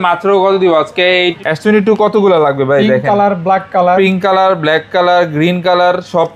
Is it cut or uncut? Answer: cut